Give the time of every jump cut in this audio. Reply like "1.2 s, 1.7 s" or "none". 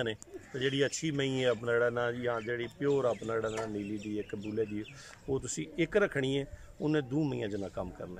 none